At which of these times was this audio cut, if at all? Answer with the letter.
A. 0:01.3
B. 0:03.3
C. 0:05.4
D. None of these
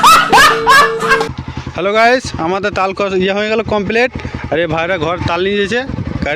A